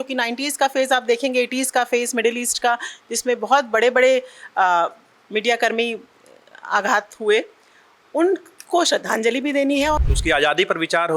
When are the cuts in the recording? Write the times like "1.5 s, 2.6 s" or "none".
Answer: 10.0 s